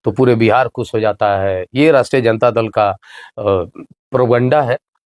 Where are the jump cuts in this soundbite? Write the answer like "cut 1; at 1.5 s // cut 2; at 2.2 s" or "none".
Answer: none